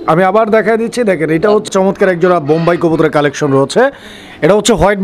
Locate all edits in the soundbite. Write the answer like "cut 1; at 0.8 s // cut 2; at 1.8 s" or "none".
cut 1; at 1.7 s